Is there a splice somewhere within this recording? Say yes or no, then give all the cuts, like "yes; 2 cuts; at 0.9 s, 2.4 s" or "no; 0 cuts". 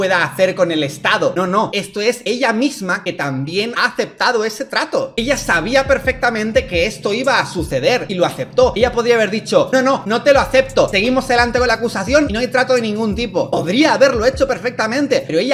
no; 0 cuts